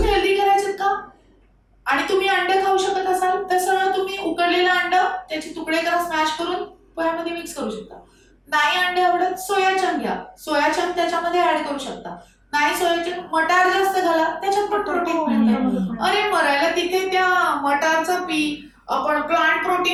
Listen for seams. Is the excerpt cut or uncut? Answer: uncut